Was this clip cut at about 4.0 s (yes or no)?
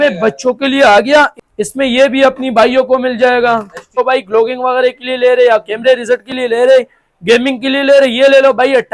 yes